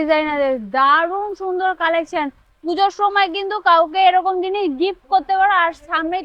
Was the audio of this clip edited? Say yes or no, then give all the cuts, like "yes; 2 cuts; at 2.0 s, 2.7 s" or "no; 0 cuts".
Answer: no; 0 cuts